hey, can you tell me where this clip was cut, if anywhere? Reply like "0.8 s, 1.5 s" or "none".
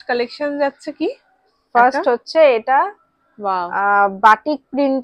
none